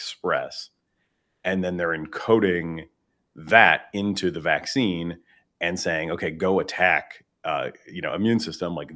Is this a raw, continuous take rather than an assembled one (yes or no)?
yes